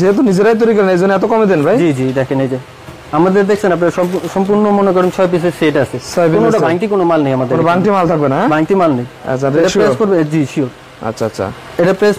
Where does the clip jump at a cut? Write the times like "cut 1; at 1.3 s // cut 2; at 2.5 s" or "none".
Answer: none